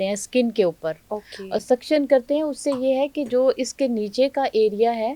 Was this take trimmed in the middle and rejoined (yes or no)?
no